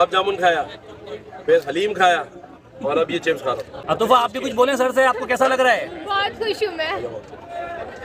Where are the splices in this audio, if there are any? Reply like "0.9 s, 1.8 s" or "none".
3.8 s